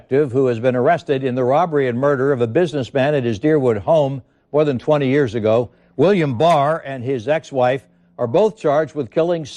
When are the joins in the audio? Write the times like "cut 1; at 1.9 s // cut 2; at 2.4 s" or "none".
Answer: none